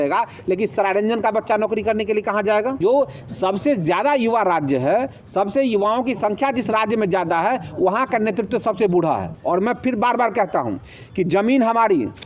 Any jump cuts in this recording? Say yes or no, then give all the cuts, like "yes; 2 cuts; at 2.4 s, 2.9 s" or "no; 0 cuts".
yes; 2 cuts; at 2.8 s, 9.3 s